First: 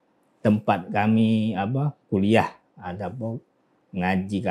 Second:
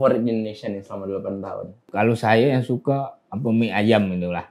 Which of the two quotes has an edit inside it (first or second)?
second